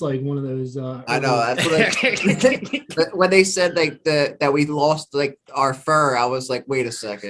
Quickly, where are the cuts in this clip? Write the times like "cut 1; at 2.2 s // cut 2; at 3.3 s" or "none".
none